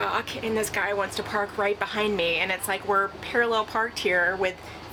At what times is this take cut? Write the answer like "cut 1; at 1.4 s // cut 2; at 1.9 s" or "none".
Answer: none